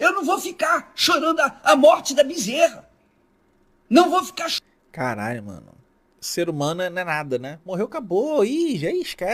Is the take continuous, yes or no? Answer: yes